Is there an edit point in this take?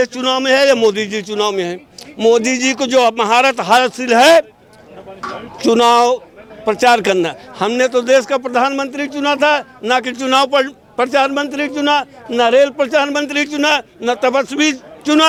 no; 0 cuts

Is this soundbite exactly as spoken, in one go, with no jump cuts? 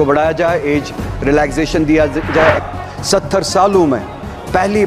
no; 1 cut; at 2.6 s

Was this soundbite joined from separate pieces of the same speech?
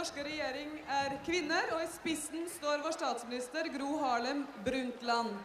yes; 1 cut; at 2.8 s

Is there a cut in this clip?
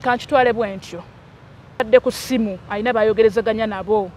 yes; 1 cut; at 1.8 s

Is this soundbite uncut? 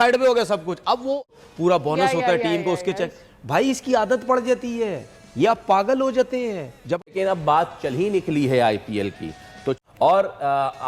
no; 3 cuts; at 1.4 s, 7.1 s, 9.8 s

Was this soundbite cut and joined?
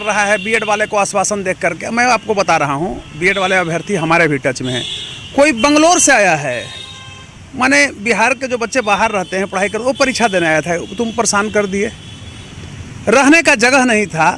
no; 0 cuts

